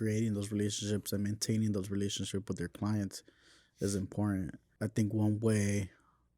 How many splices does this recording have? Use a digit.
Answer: 1